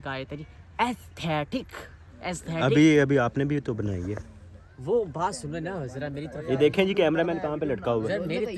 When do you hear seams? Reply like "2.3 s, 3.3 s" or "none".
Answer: none